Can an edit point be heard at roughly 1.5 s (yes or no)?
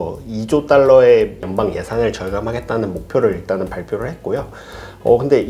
yes